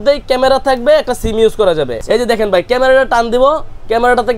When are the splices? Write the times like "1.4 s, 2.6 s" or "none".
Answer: 2.0 s